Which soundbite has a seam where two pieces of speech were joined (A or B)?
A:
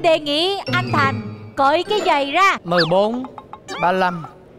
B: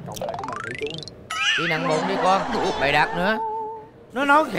A